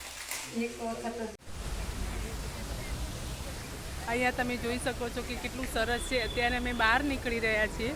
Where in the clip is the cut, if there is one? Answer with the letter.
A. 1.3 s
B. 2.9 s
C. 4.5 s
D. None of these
A